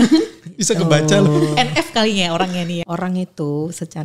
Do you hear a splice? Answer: yes; 1 cut; at 2.8 s

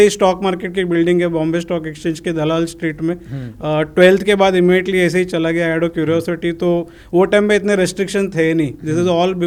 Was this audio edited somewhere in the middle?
no; 0 cuts

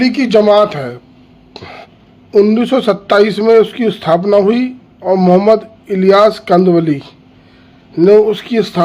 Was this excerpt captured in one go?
no; 1 cut; at 2.0 s

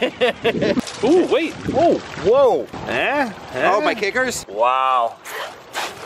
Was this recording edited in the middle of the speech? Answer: yes; 3 cuts; at 0.8 s, 2.8 s, 4.4 s

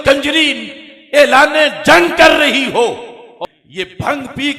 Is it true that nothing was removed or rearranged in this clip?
no; 1 cut; at 3.3 s

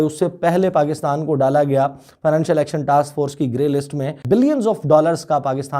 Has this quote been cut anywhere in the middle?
yes; 1 cut; at 4.2 s

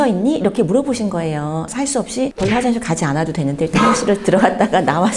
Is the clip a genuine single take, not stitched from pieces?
no; 1 cut; at 1.7 s

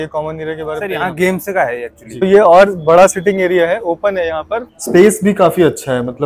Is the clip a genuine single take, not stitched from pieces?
no; 2 cuts; at 2.0 s, 4.7 s

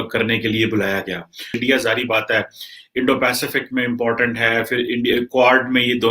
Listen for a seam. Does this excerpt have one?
yes; 1 cut; at 1.6 s

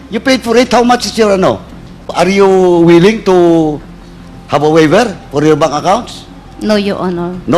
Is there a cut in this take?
yes; 1 cut; at 2.1 s

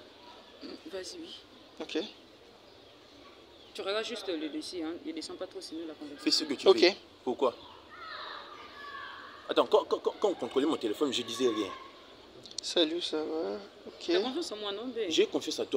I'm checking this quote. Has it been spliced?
no; 0 cuts

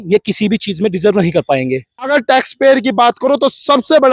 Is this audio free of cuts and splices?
no; 1 cut; at 2.1 s

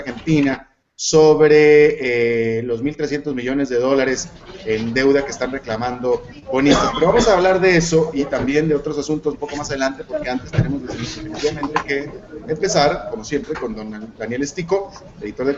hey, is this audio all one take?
no; 1 cut; at 11.5 s

